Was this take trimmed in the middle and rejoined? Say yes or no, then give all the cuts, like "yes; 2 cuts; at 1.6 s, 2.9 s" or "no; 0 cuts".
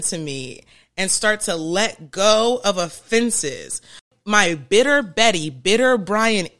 yes; 1 cut; at 4.1 s